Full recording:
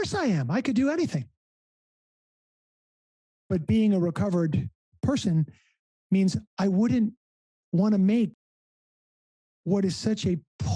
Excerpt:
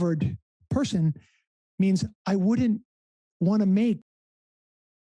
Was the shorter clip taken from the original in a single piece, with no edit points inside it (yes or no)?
yes